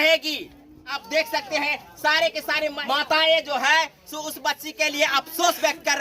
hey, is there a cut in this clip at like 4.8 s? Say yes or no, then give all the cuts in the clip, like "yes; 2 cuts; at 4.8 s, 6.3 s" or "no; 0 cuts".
no; 2 cuts; at 1.0 s, 2.8 s